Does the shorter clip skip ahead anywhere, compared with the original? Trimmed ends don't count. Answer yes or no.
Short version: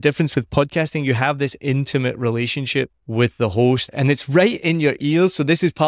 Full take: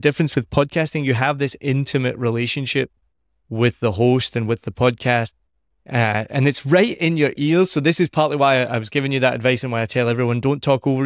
yes